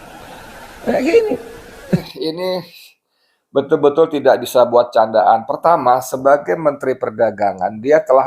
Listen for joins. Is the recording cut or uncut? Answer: cut